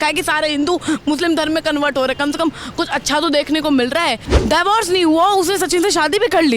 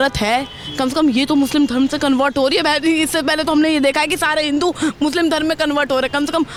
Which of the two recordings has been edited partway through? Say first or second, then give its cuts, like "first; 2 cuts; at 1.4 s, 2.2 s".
first; 1 cut; at 4.3 s